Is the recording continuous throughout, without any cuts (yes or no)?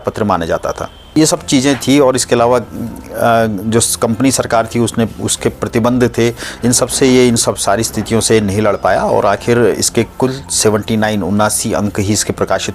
no